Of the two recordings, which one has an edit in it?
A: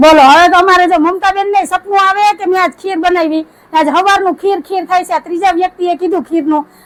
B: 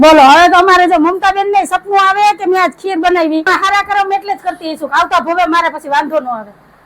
B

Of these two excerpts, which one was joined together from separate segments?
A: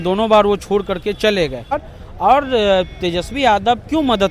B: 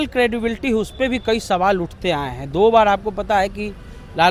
A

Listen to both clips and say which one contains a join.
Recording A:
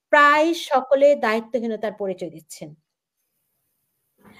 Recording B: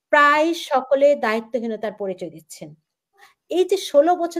B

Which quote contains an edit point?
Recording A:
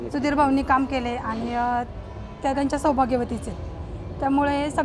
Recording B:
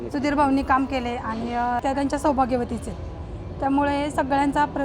B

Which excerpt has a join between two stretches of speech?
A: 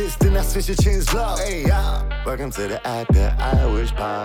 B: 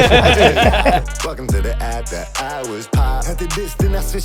B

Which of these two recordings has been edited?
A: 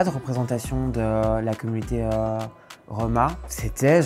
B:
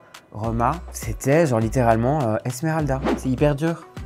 B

